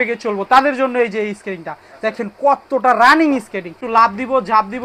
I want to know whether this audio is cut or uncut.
cut